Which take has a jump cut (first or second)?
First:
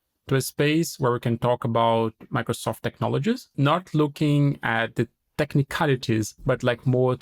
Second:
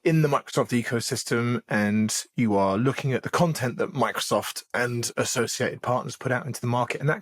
first